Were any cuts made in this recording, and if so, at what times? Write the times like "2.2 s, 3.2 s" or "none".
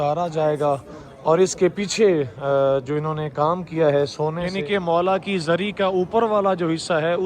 4.4 s